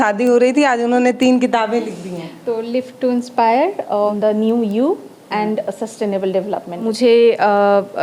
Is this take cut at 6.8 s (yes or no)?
yes